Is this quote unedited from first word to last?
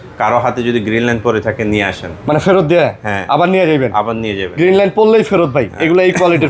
yes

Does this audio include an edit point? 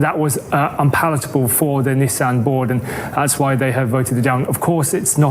no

